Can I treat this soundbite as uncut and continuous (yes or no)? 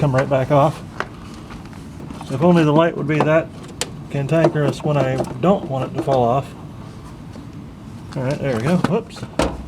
no